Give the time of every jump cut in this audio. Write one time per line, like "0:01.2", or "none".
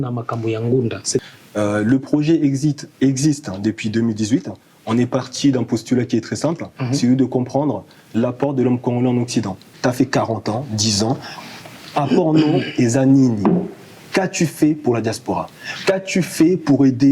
0:01.2
0:09.7